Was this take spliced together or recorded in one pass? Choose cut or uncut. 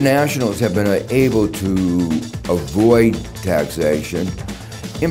uncut